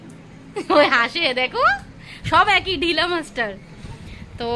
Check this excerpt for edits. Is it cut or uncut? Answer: uncut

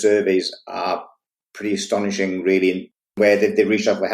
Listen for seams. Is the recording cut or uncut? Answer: cut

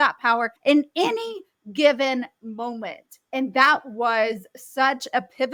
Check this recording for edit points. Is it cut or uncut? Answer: uncut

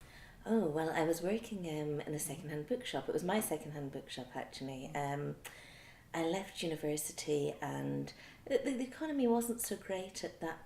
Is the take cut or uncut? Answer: uncut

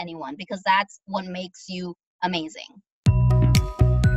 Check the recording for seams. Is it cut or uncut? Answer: cut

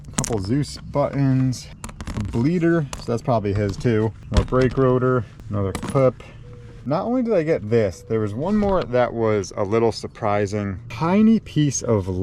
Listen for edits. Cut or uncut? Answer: cut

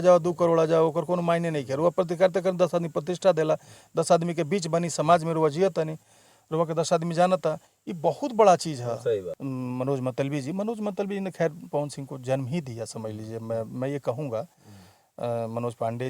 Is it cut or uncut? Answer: cut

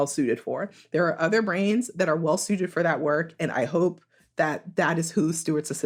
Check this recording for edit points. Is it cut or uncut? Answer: uncut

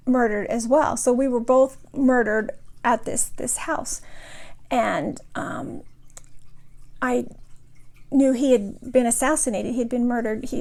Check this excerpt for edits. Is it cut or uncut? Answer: uncut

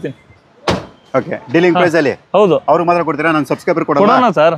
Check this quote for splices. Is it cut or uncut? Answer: uncut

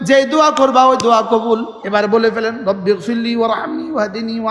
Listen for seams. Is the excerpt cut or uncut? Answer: cut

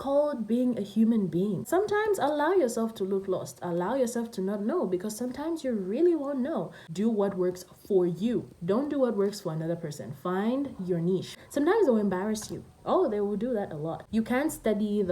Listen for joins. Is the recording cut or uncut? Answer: cut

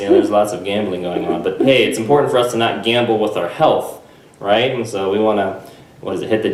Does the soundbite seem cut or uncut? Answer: uncut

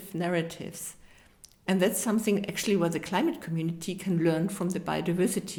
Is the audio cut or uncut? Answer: uncut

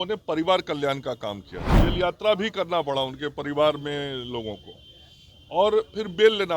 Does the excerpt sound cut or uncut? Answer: cut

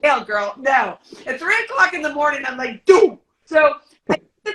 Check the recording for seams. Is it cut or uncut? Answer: cut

